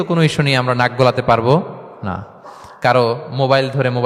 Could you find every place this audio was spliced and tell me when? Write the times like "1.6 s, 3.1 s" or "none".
none